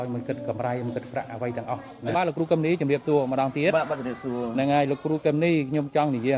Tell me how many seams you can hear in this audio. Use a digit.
1